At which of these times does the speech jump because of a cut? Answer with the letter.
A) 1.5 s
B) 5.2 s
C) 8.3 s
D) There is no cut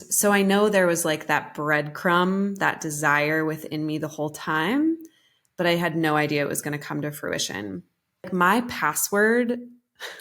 C